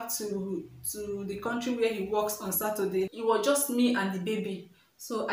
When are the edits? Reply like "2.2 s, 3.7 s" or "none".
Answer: 3.1 s